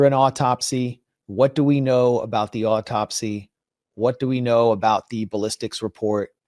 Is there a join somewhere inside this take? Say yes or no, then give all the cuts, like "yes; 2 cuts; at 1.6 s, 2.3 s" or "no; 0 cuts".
no; 0 cuts